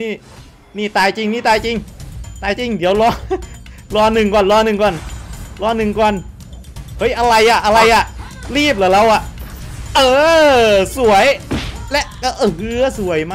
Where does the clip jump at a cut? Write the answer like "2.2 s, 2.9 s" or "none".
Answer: none